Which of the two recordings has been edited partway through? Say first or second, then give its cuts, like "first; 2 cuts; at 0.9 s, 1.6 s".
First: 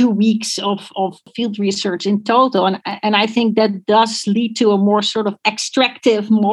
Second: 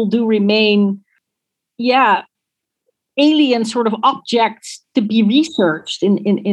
first; 1 cut; at 1.3 s